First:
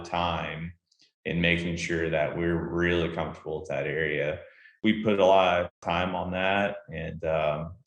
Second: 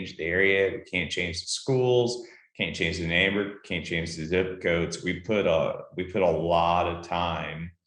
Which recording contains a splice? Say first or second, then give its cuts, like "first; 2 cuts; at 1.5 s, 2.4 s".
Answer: first; 2 cuts; at 4.7 s, 5.8 s